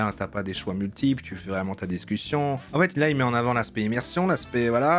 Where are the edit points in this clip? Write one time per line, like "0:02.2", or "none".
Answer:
0:02.6